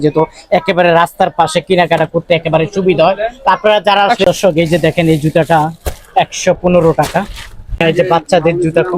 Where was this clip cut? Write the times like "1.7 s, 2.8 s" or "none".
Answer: 4.4 s, 7.8 s